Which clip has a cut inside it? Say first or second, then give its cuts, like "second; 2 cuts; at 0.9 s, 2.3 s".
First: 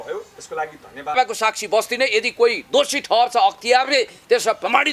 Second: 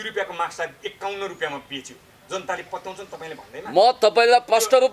first; 1 cut; at 1.1 s